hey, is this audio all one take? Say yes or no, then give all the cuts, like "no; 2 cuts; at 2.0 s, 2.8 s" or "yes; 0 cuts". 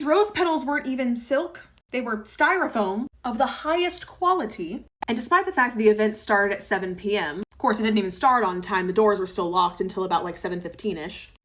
no; 1 cut; at 4.8 s